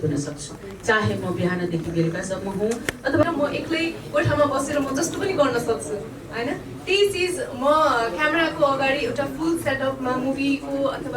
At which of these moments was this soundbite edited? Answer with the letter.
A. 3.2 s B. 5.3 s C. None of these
A